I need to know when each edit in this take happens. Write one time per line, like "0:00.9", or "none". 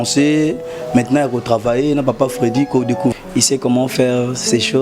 0:03.1

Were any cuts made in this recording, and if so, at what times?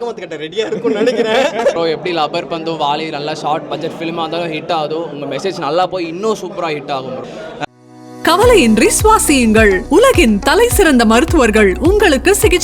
0:07.6

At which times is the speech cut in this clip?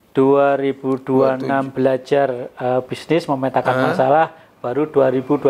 none

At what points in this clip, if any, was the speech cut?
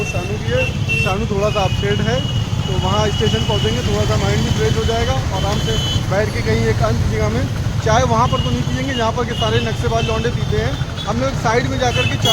none

